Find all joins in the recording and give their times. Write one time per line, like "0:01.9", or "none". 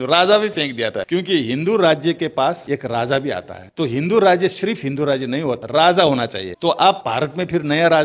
0:01.0
0:02.6
0:03.6
0:05.6
0:06.4
0:07.0